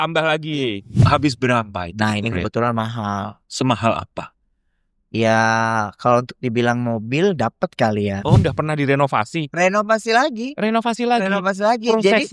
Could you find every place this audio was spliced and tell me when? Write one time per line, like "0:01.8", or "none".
0:01.1
0:08.4